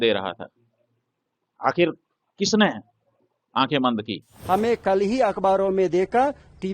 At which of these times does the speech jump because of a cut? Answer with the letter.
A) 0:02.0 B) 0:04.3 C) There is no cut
B